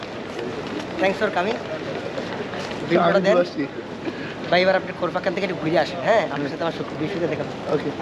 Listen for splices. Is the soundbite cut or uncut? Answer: uncut